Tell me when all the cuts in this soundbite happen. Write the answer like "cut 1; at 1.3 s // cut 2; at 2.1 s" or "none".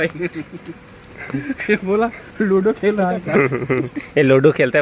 none